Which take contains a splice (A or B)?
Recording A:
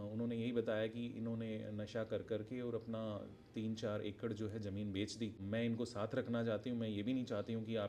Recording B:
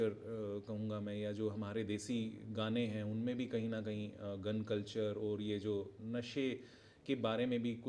A